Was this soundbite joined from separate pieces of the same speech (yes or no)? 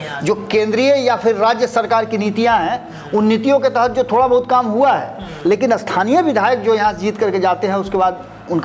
no